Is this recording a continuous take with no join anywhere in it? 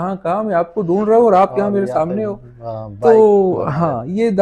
yes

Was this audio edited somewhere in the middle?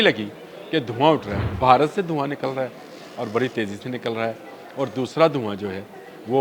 yes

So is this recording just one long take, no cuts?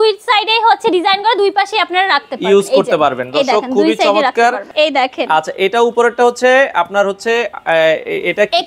no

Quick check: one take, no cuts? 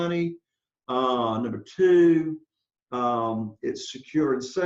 yes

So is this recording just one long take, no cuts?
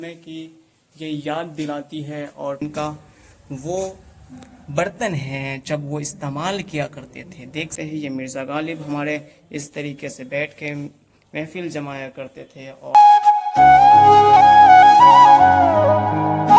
no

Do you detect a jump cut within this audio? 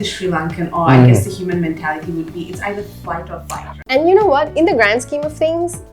yes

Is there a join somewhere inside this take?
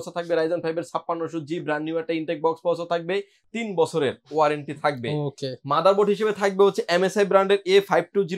no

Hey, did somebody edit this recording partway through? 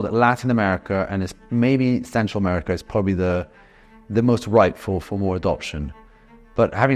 no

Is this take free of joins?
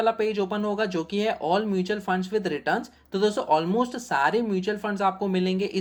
yes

